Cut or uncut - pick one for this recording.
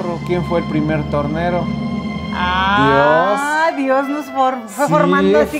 uncut